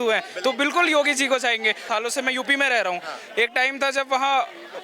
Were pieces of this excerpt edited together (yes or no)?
yes